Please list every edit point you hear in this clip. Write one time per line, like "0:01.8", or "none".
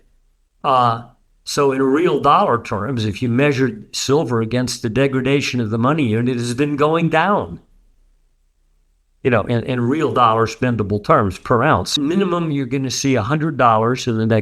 0:11.9